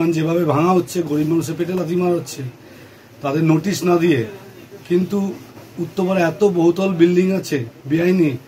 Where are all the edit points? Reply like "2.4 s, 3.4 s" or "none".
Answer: none